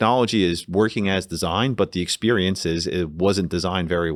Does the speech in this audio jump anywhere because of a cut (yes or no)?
no